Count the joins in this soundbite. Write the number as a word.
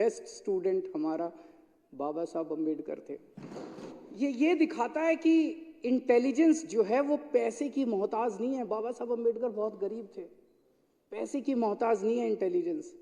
one